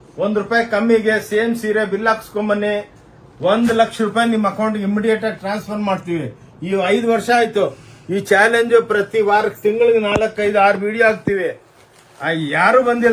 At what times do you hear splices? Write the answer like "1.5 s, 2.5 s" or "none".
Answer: none